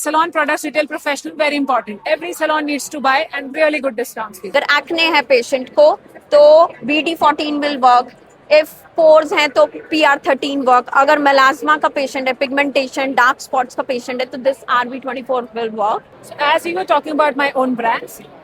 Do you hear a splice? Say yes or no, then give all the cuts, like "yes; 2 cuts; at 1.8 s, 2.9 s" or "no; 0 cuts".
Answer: yes; 2 cuts; at 4.5 s, 16.2 s